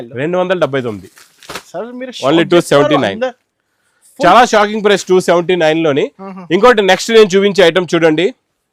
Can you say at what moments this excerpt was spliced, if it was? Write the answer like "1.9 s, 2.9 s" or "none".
none